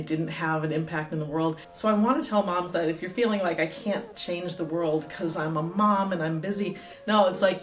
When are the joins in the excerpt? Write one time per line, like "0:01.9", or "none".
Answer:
0:01.7